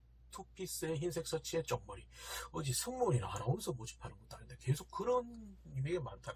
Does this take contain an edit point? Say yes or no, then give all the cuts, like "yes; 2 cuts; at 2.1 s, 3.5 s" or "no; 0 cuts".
no; 0 cuts